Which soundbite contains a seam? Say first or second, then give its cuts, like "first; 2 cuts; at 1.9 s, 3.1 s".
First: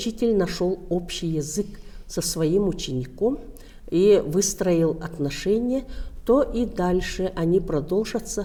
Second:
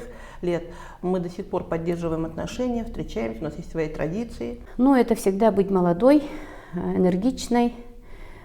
second; 1 cut; at 4.6 s